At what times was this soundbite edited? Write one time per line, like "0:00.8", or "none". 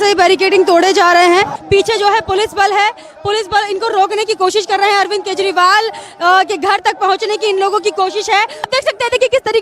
0:01.6
0:08.6